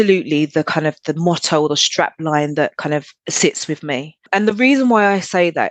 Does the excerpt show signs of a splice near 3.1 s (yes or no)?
yes